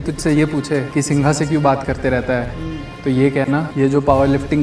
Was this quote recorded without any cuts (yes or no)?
no